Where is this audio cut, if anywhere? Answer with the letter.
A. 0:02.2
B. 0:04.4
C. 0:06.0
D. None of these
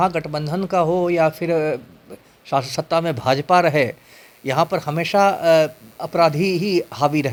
D